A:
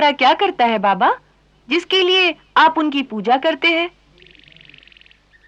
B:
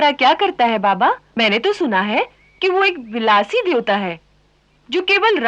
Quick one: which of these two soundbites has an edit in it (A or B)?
B